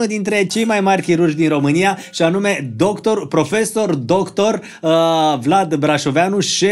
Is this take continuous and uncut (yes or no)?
yes